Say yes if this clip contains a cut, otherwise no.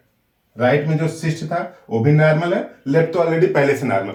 no